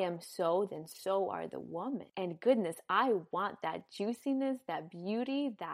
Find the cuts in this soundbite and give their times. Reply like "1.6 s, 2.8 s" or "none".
none